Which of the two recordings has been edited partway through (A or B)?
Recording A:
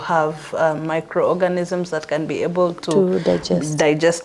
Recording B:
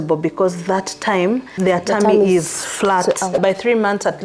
B